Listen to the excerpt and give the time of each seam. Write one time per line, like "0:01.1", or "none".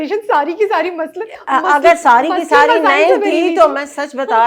none